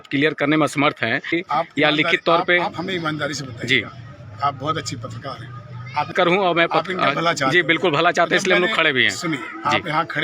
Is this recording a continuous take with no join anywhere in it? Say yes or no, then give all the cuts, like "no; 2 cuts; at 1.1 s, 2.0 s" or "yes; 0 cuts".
no; 2 cuts; at 1.4 s, 6.1 s